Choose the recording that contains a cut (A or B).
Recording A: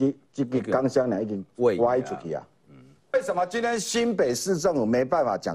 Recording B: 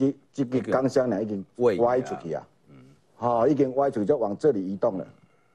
A